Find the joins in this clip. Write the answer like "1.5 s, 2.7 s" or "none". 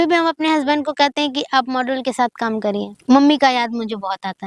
2.9 s